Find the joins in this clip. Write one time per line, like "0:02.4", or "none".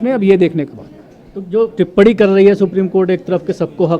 none